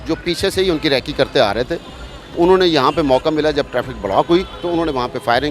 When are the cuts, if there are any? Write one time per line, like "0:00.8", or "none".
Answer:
none